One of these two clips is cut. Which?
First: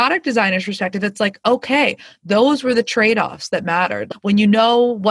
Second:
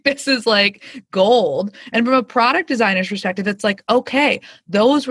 first; 1 cut; at 4.1 s

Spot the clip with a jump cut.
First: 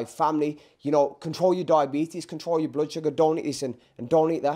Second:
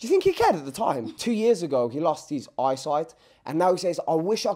second; 1 cut; at 1.1 s

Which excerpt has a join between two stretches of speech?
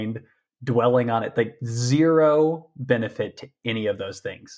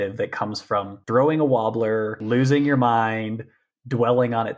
second; 2 cuts; at 1.0 s, 2.2 s

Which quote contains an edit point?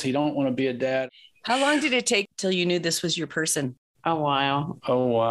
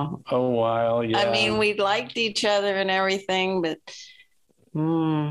first; 2 cuts; at 1.1 s, 2.3 s

